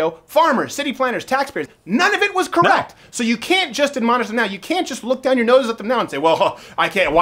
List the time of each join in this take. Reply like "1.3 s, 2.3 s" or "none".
1.7 s